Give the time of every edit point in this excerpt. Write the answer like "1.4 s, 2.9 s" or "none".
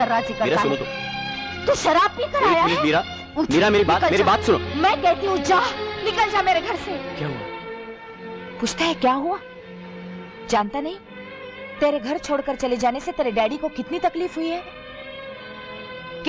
7.1 s